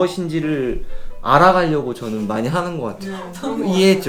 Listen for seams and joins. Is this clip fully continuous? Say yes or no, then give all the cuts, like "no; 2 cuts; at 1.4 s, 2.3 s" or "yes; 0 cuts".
yes; 0 cuts